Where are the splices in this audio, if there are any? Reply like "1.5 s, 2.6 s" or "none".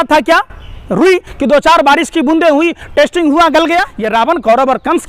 3.9 s